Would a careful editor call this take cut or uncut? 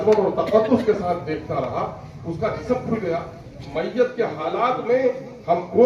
cut